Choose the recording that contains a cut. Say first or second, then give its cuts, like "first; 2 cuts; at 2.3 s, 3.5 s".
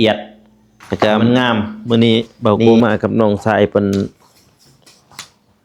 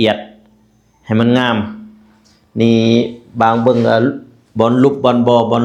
first; 1 cut; at 1.8 s